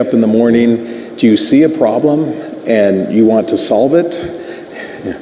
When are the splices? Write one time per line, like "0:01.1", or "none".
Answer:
0:02.1